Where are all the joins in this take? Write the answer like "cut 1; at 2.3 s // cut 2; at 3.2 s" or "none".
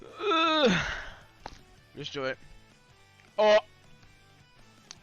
cut 1; at 4.0 s